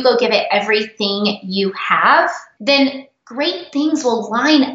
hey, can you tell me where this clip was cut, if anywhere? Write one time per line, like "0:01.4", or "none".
0:02.5

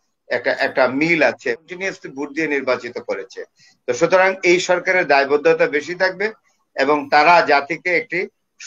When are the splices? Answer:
0:01.6

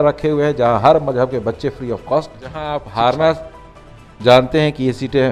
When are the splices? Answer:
0:02.8

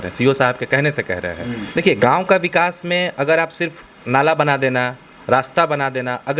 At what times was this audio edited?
0:01.6

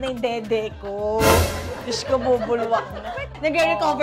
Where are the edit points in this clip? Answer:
0:03.1

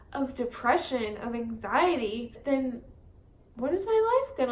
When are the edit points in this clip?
0:02.4

